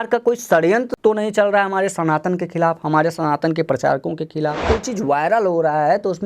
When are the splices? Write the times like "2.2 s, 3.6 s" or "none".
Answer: 0.9 s, 4.6 s